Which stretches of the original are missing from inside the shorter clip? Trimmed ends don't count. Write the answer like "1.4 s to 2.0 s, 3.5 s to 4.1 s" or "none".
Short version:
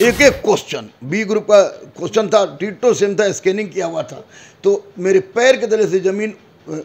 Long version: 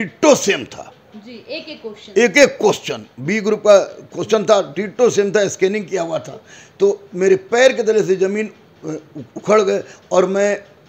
none